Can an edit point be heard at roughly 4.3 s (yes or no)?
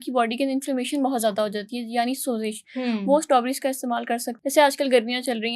yes